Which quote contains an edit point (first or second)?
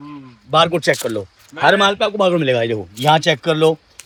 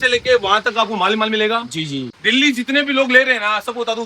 second